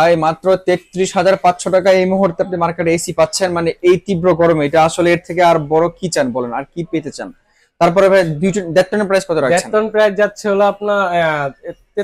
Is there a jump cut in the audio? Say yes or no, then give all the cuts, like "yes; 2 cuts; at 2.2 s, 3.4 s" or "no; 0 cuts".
no; 0 cuts